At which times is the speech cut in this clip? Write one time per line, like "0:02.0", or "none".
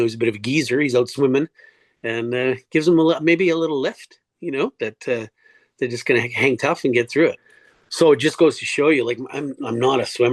0:07.5